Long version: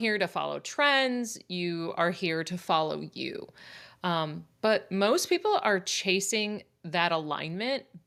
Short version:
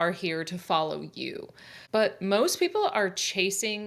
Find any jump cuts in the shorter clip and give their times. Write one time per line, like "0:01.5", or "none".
0:01.7